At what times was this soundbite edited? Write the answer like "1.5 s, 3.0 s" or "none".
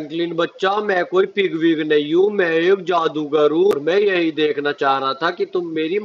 3.7 s